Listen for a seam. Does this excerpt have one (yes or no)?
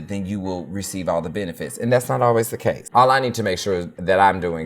yes